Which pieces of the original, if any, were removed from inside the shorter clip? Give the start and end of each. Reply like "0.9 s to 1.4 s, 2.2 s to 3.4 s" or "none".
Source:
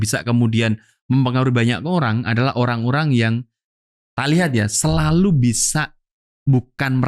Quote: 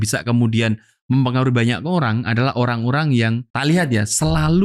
3.5 s to 4.1 s